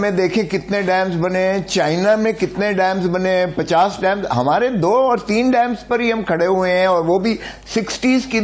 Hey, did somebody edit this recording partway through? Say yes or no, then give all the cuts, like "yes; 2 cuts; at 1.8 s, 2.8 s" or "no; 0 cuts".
no; 0 cuts